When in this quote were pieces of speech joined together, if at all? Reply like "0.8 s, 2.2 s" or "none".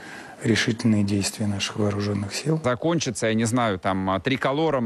2.6 s